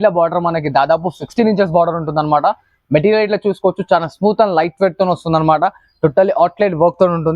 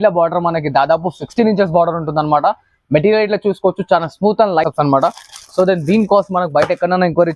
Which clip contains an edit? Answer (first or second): second